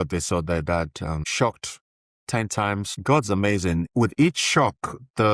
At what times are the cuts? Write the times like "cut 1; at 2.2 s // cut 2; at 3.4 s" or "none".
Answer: cut 1; at 1.3 s // cut 2; at 2.9 s // cut 3; at 3.9 s